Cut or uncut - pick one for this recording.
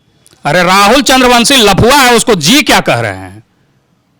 uncut